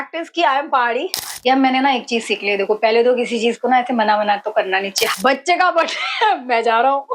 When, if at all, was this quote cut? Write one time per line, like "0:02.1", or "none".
0:01.2
0:05.1